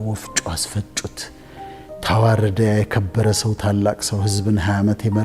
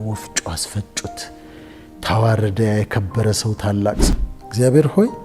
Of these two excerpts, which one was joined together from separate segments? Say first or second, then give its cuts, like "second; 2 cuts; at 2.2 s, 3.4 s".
second; 1 cut; at 4.0 s